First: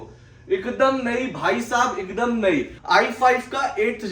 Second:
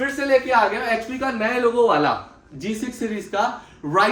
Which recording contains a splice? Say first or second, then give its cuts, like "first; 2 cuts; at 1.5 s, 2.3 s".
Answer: first; 1 cut; at 2.8 s